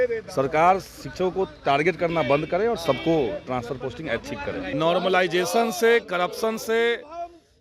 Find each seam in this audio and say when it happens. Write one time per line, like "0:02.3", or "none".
0:04.7